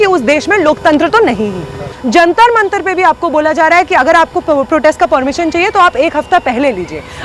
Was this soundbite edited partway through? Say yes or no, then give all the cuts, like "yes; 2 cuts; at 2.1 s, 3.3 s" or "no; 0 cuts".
yes; 1 cut; at 1.9 s